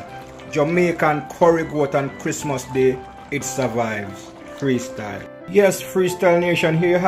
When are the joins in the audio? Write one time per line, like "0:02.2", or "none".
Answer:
0:05.8